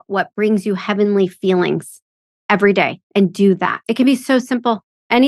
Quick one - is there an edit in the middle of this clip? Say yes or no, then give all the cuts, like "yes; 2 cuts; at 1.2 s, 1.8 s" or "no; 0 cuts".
yes; 1 cut; at 3.8 s